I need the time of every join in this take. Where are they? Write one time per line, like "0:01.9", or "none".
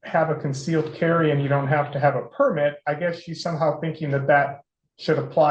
none